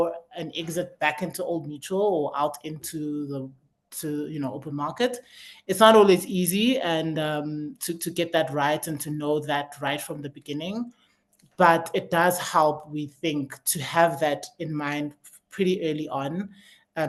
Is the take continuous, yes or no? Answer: yes